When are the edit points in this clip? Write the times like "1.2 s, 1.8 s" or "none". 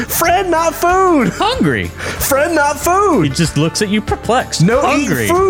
none